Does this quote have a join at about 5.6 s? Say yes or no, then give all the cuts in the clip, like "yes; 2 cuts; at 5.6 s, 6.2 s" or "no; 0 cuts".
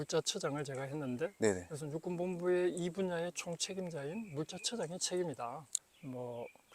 yes; 1 cut; at 5.6 s